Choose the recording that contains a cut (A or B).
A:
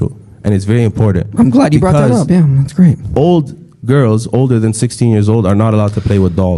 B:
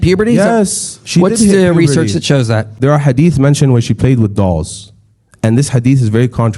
B